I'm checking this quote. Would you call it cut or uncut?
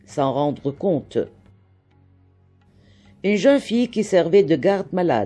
cut